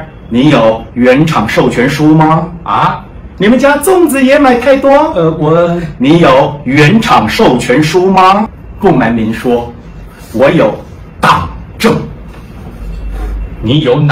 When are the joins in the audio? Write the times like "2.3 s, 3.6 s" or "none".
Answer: 8.5 s